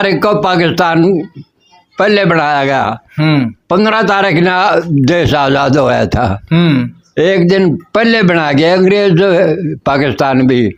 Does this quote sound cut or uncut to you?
uncut